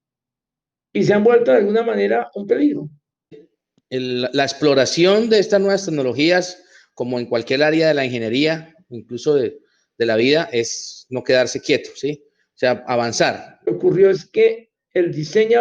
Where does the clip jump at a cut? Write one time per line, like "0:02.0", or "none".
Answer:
0:03.4
0:13.7